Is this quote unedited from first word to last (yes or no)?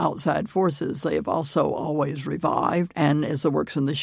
no